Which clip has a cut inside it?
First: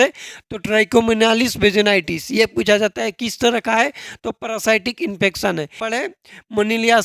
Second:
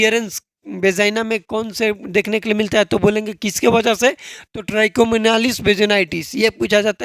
first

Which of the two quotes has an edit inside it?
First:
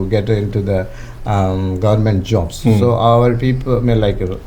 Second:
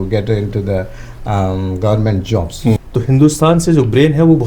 second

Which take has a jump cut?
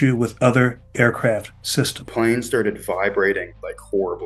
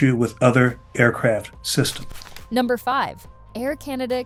first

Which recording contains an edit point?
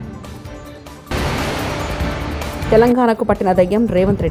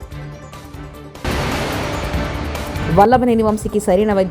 second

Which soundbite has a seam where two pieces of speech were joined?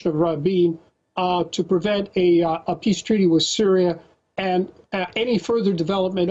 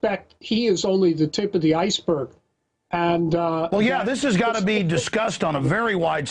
second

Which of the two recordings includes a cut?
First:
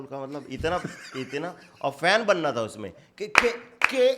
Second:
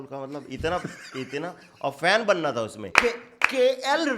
second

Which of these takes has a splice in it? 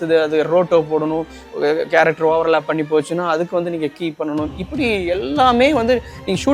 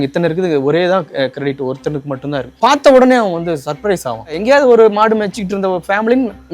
second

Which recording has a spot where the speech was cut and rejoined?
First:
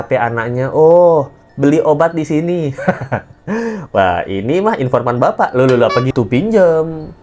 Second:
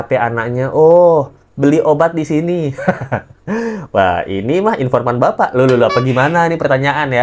first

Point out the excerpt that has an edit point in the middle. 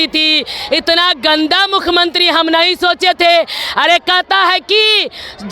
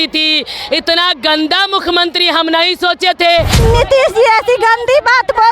second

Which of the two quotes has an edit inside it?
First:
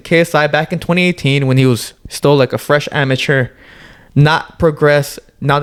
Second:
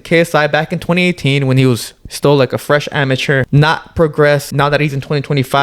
second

